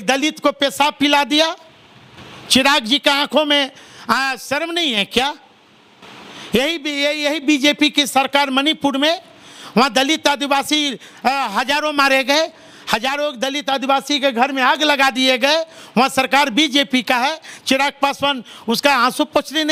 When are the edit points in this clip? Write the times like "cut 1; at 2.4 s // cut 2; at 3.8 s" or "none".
none

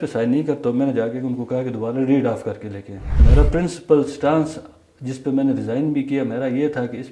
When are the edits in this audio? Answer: cut 1; at 3.2 s

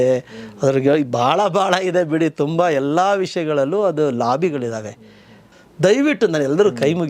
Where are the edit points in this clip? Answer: cut 1; at 5.4 s

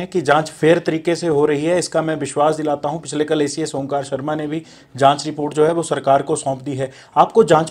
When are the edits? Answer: none

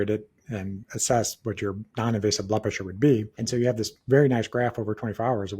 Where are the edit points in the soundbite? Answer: cut 1; at 1.9 s // cut 2; at 3.4 s

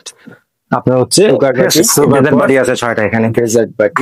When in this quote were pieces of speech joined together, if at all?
cut 1; at 2.2 s

